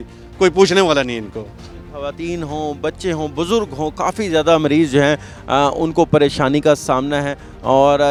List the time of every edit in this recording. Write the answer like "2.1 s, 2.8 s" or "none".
none